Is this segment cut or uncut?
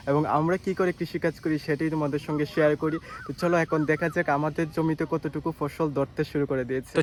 uncut